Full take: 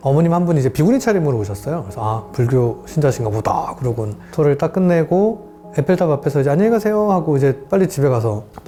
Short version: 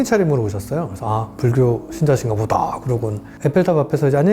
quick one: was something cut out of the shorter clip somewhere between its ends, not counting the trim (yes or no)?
yes